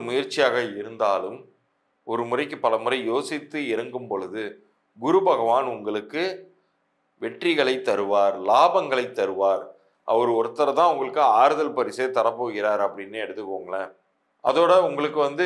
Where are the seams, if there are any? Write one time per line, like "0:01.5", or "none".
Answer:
none